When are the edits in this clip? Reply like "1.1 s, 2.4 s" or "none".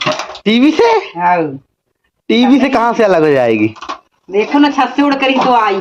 none